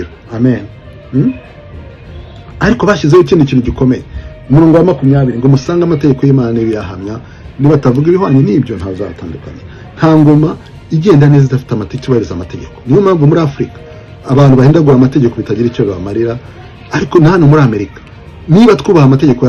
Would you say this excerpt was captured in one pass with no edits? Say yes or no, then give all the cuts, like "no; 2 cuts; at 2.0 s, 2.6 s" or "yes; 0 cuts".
yes; 0 cuts